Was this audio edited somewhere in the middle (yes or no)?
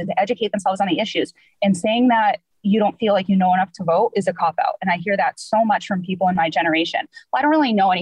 no